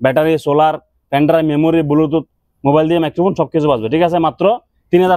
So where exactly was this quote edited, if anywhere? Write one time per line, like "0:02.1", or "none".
none